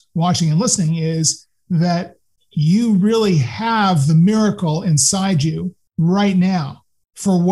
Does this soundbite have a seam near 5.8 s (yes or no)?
yes